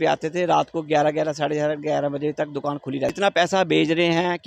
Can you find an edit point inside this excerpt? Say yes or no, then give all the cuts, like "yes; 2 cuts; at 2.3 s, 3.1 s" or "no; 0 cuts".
yes; 1 cut; at 3.2 s